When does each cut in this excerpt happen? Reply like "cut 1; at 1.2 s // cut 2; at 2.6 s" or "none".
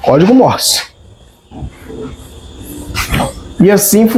none